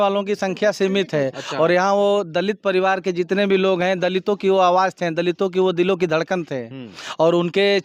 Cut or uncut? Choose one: uncut